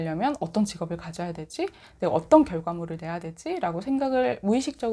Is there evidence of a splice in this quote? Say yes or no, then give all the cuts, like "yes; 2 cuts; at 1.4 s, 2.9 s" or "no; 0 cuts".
no; 0 cuts